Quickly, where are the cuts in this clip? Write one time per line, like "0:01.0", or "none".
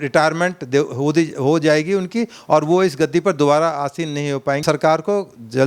0:04.6